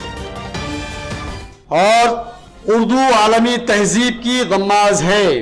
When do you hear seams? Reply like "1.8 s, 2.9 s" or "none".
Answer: none